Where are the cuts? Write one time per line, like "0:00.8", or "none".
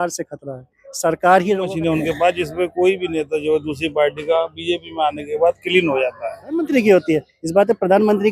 0:01.7
0:06.6

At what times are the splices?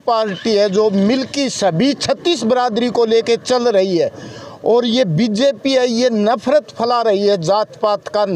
none

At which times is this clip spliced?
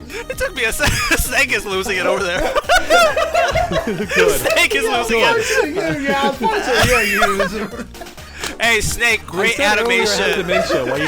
none

